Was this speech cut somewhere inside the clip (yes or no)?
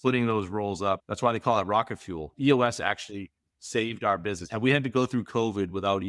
yes